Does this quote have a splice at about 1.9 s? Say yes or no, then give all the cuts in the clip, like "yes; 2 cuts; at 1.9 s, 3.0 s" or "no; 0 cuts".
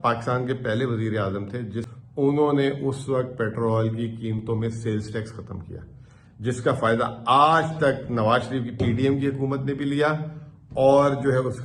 yes; 1 cut; at 1.9 s